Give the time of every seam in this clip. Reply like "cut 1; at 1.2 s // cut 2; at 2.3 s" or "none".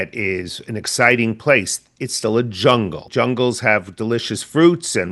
cut 1; at 3.1 s